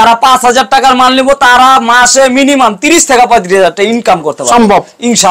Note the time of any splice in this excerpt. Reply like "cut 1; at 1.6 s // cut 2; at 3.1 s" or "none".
none